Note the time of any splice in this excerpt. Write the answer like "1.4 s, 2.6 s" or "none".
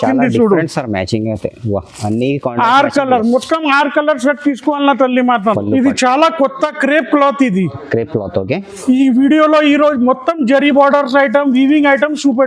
5.6 s